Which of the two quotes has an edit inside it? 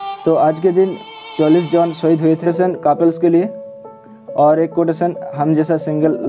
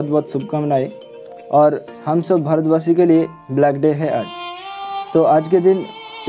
first; 1 cut; at 2.4 s

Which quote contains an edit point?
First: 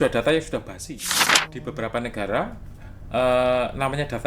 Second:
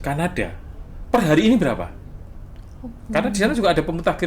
first; 1 cut; at 1.3 s

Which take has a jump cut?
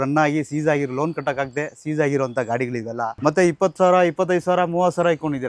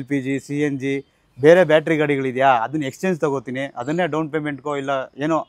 first; 1 cut; at 3.2 s

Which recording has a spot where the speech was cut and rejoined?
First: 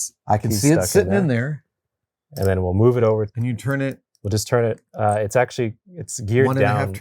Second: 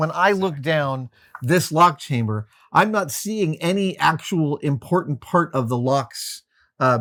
first; 1 cut; at 3.3 s

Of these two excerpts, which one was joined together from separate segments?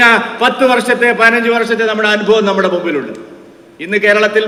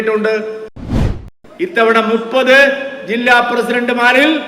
second; 1 cut; at 1.0 s

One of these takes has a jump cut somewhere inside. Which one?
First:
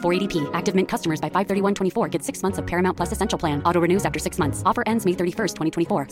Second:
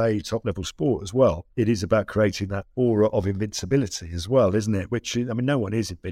second; 3 cuts; at 1.5 s, 2.6 s, 4.8 s

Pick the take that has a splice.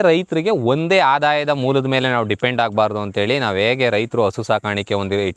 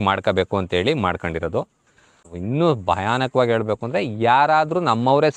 second; 1 cut; at 2.3 s

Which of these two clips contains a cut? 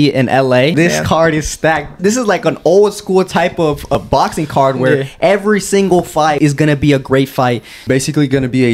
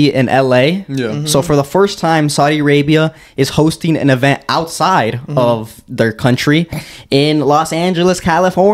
first; 5 cuts; at 0.7 s, 2.0 s, 4.0 s, 6.4 s, 7.8 s

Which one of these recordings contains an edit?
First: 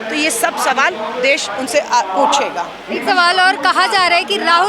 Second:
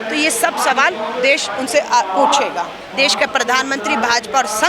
second; 1 cut; at 2.8 s

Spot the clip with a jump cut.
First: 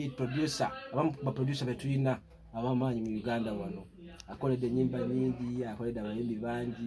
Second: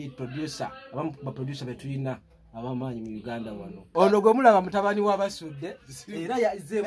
second; 1 cut; at 3.9 s

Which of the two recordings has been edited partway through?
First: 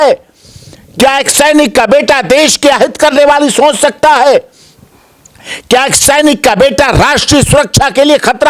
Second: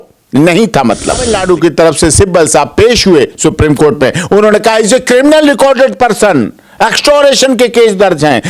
second; 1 cut; at 1.3 s

